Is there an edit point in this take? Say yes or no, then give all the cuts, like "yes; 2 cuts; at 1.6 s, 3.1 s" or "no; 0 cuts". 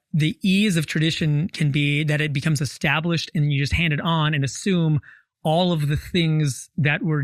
no; 0 cuts